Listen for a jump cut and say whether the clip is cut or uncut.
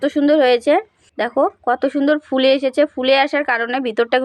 cut